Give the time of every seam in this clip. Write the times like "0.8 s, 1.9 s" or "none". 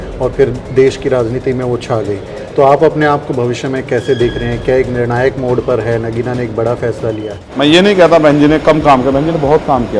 7.3 s